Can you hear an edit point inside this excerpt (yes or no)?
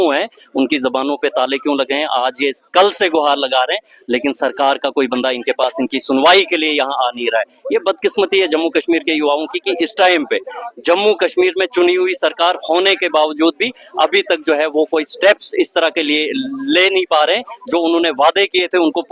no